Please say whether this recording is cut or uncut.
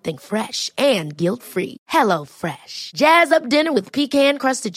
uncut